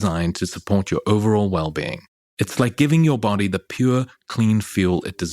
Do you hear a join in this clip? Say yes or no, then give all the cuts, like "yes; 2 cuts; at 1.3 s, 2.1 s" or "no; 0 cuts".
yes; 1 cut; at 2.1 s